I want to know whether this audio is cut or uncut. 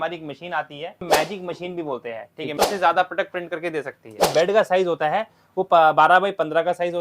cut